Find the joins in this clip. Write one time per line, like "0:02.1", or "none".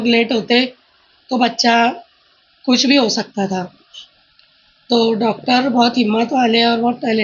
none